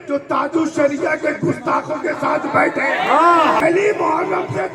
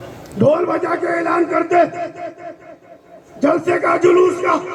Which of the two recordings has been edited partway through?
first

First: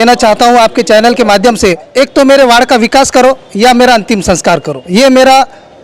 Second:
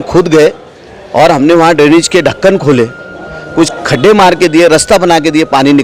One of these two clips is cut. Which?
first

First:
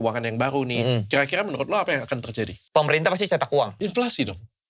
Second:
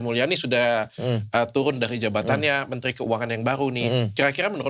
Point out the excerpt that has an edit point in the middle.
first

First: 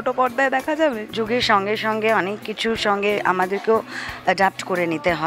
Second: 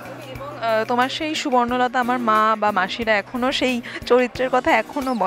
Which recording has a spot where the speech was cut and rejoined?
first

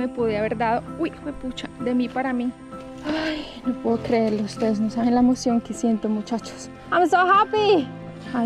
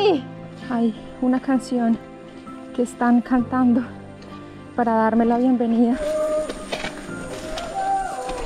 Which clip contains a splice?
second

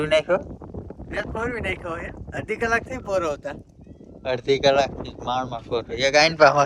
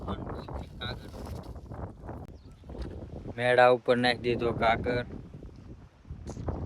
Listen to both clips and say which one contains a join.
second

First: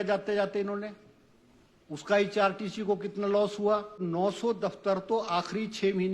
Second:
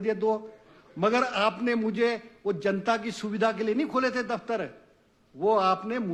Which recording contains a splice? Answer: first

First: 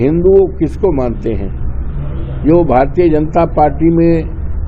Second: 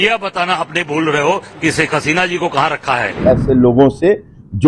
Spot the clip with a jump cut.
second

